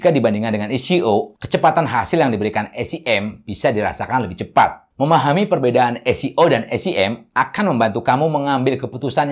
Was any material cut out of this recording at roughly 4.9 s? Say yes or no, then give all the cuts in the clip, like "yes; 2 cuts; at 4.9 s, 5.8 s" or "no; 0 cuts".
yes; 1 cut; at 4.9 s